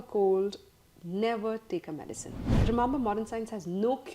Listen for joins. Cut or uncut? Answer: cut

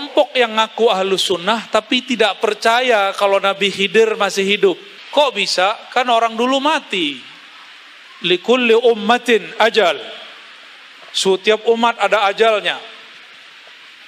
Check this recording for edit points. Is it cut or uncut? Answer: cut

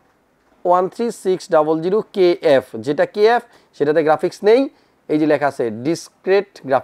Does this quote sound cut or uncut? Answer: uncut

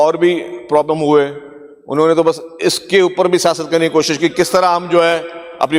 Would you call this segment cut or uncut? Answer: uncut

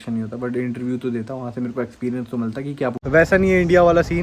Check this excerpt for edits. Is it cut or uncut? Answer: cut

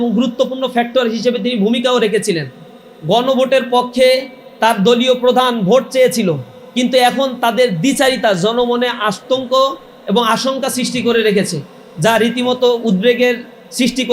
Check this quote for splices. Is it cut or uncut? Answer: uncut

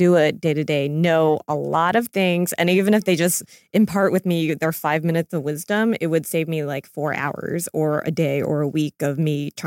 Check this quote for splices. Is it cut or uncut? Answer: uncut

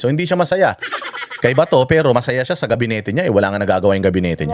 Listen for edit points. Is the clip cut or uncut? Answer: uncut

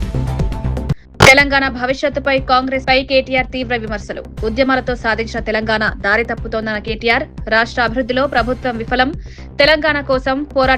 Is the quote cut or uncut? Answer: cut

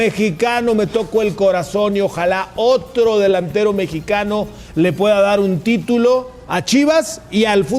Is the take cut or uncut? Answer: uncut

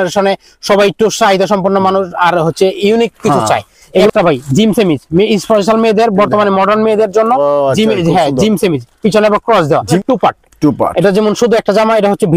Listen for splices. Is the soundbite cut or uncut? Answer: cut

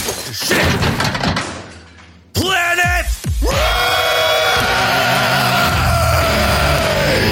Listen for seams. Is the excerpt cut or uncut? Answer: uncut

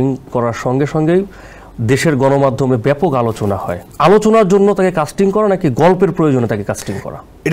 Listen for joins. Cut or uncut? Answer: uncut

